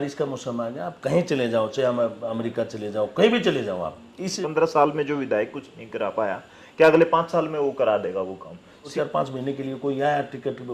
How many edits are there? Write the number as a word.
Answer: two